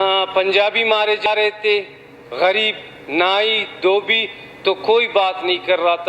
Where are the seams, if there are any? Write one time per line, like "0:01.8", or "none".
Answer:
0:01.3